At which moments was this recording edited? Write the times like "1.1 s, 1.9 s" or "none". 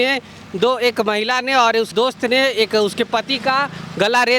1.9 s